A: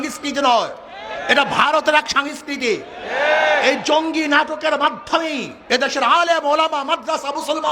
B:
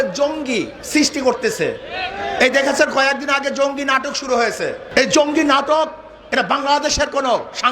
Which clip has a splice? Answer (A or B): B